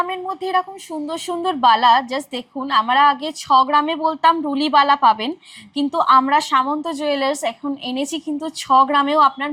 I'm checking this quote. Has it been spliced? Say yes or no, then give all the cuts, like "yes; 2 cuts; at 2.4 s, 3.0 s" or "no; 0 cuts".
no; 0 cuts